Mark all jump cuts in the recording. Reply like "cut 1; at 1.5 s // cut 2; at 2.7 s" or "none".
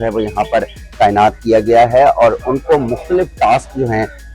none